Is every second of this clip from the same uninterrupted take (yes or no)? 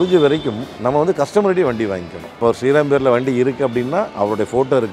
yes